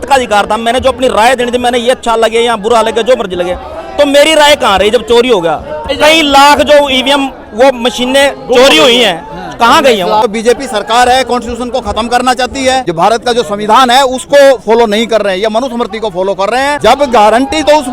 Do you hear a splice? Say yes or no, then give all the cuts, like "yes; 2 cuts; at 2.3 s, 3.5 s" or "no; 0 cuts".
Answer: yes; 4 cuts; at 5.9 s, 10.2 s, 12.8 s, 16.7 s